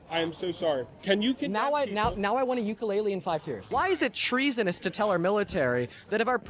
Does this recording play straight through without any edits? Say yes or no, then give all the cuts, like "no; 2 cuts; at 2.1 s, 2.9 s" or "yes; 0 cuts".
no; 1 cut; at 3.6 s